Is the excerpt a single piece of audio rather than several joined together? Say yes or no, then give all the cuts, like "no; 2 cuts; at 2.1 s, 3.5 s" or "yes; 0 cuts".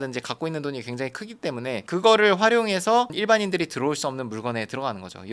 yes; 0 cuts